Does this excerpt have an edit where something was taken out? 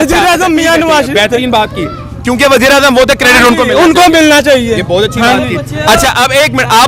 no; 0 cuts

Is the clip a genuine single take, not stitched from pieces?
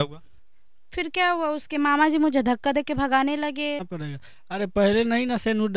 no; 1 cut; at 3.9 s

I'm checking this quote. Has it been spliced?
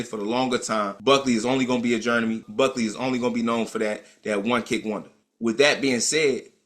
yes; 3 cuts; at 0.9 s, 2.4 s, 5.1 s

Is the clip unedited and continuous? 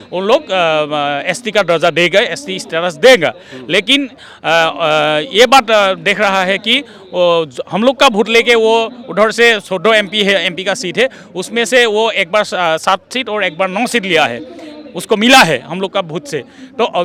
yes; 0 cuts

